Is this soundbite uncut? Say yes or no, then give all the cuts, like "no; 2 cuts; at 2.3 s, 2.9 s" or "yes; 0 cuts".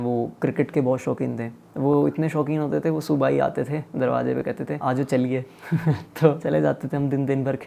no; 3 cuts; at 1.6 s, 4.8 s, 6.4 s